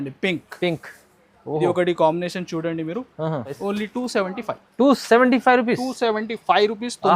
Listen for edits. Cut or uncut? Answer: cut